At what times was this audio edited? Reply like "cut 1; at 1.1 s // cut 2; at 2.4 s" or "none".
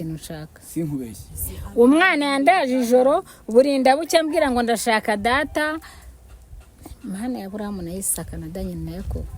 none